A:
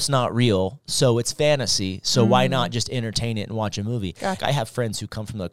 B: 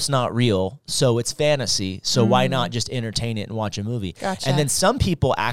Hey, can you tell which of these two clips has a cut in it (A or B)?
A